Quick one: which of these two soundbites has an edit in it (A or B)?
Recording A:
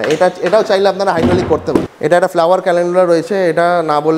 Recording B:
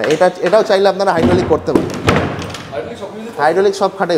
A